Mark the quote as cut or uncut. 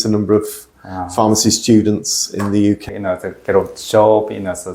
cut